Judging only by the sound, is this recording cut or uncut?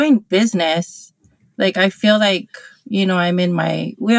uncut